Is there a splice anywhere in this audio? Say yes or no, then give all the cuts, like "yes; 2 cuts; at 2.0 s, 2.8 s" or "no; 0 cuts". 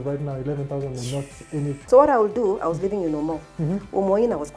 yes; 1 cut; at 1.8 s